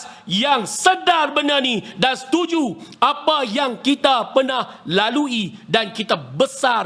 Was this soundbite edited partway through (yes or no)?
no